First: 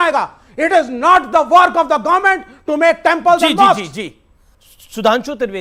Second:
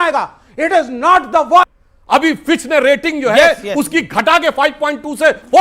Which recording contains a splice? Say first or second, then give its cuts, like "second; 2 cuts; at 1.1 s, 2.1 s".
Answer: second; 1 cut; at 1.7 s